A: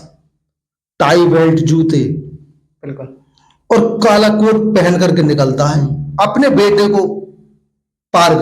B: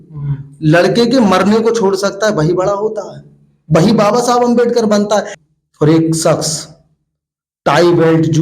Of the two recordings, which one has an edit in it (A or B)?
B